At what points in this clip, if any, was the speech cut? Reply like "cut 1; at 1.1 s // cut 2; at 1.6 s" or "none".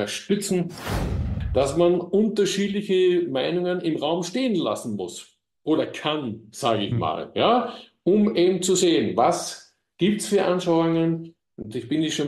cut 1; at 1.2 s